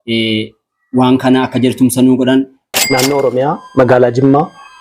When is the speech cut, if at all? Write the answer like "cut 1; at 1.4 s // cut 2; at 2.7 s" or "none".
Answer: cut 1; at 2.8 s